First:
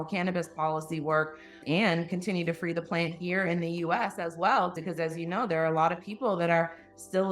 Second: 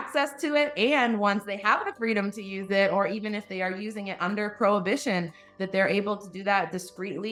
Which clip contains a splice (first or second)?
first